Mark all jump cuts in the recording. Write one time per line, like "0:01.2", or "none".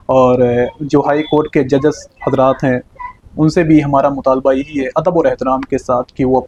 none